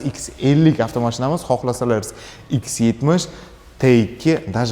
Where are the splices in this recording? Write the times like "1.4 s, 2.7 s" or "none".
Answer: none